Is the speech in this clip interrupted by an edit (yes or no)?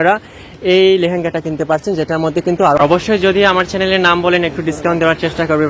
yes